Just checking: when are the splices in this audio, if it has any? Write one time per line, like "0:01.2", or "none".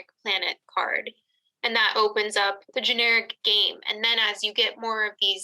0:02.6